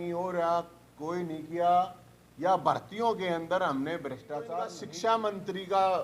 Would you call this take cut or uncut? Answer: cut